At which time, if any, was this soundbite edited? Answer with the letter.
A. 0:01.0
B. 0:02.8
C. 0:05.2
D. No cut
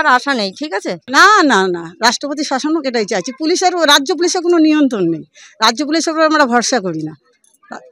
A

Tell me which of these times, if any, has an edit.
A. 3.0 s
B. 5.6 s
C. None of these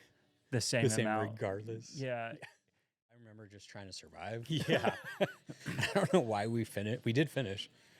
A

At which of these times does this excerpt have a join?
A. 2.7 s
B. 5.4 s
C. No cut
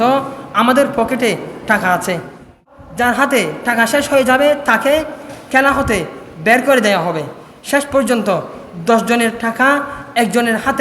A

